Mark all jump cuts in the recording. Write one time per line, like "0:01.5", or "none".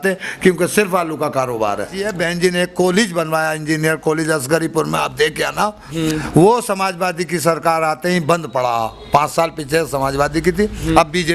0:02.0

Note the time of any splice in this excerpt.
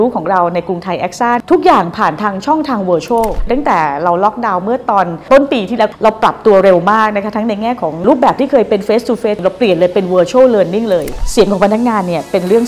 0:01.4
0:03.5
0:09.4
0:11.2

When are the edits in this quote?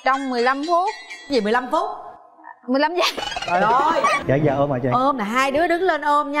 0:04.2

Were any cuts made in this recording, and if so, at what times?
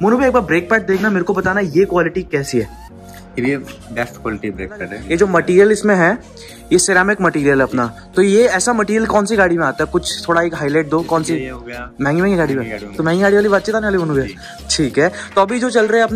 none

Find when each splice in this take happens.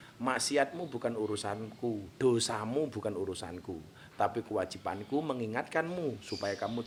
none

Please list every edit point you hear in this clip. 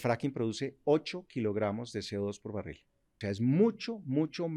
0:03.1

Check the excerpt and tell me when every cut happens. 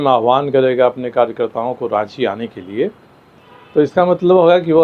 none

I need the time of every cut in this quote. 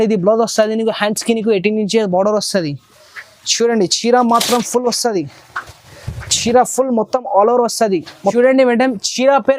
0:08.3

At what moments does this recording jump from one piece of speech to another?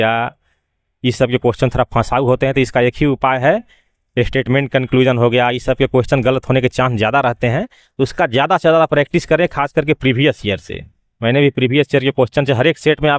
none

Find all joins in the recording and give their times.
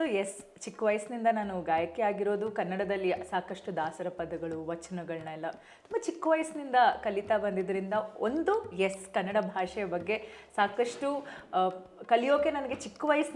none

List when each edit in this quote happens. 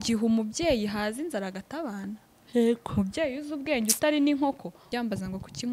0:04.8

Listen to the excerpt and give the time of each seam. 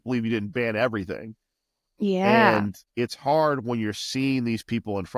0:02.8

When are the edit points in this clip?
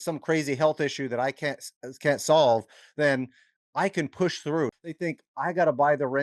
0:04.8

